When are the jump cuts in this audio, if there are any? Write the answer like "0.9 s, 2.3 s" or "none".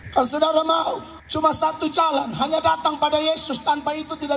1.1 s